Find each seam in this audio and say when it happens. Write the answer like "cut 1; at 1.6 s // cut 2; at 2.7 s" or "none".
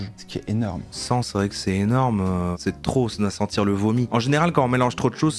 cut 1; at 0.9 s // cut 2; at 2.5 s // cut 3; at 4.1 s